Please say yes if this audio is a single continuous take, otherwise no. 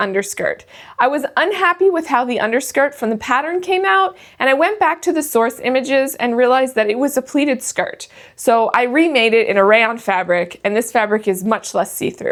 yes